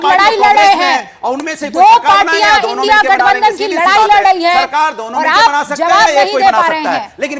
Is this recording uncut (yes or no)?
yes